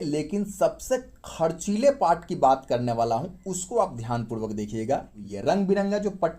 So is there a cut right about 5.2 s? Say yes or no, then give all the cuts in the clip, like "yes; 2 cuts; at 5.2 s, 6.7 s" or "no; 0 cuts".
yes; 1 cut; at 5.2 s